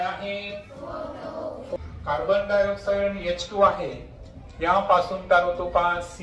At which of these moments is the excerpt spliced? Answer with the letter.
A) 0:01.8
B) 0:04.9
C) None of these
A